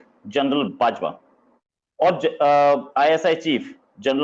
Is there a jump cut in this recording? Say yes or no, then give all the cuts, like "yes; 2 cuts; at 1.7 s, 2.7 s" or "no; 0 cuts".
no; 0 cuts